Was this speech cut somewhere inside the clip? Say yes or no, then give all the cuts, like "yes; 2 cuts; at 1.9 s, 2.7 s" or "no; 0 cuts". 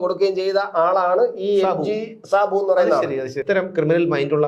yes; 1 cut; at 3.4 s